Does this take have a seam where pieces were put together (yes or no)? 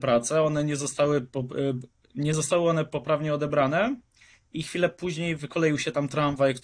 no